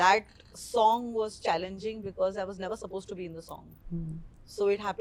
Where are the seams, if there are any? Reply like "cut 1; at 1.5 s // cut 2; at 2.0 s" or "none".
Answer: none